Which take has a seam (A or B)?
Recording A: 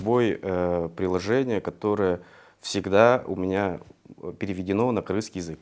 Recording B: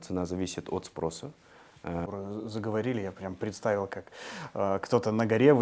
B